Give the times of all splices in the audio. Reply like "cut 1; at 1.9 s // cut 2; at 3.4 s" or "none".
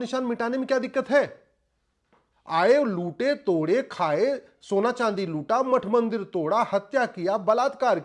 none

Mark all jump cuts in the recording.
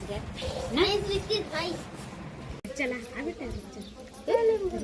cut 1; at 2.6 s

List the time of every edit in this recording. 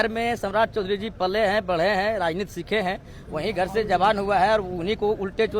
none

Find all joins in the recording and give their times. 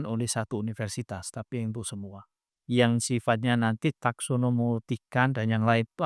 cut 1; at 2.5 s

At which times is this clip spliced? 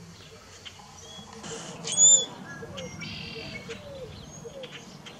cut 1; at 1.4 s

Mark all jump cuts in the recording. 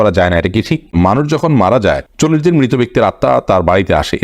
cut 1; at 0.9 s // cut 2; at 2.1 s

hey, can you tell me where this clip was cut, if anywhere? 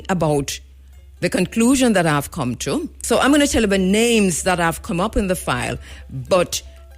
cut 1; at 2.9 s

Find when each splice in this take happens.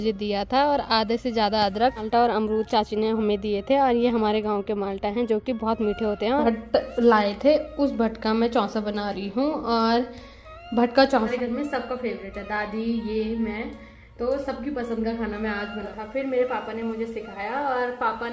cut 1; at 2.0 s // cut 2; at 6.4 s // cut 3; at 11.3 s // cut 4; at 15.9 s

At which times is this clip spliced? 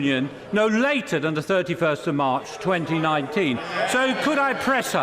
cut 1; at 3.8 s

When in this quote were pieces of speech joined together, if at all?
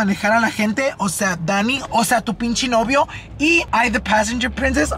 cut 1; at 3.6 s

